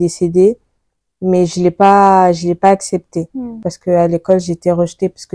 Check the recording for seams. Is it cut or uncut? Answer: cut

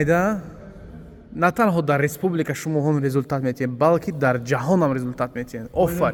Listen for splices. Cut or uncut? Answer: uncut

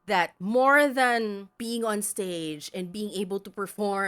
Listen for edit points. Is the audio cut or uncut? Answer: cut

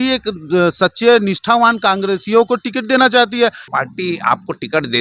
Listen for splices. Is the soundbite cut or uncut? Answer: cut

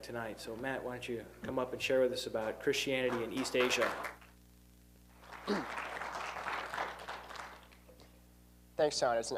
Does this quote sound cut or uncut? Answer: uncut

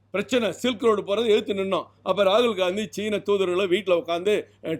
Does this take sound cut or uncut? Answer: uncut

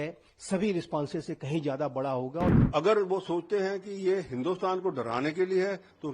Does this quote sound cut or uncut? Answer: cut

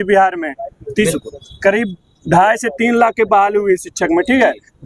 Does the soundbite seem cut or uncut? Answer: uncut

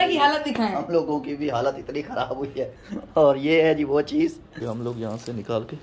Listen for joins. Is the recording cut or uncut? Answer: cut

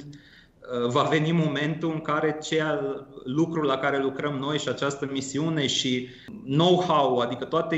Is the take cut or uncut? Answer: cut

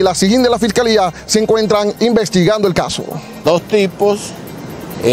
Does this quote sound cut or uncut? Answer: cut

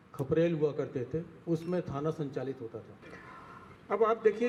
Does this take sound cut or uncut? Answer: uncut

